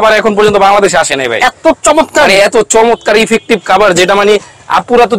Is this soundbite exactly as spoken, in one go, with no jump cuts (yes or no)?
yes